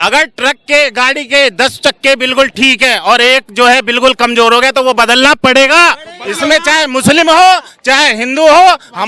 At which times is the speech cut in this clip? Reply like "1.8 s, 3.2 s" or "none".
none